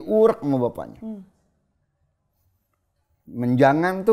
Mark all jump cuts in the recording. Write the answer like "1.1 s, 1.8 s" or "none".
none